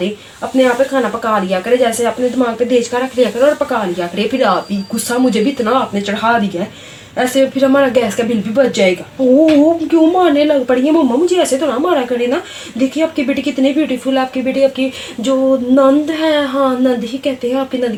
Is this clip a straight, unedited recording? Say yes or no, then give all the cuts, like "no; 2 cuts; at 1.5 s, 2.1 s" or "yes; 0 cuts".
yes; 0 cuts